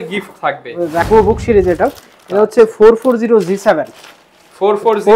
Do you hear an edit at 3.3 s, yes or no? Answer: no